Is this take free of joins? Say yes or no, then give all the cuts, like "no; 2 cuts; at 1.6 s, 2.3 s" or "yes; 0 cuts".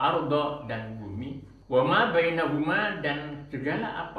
no; 1 cut; at 1.5 s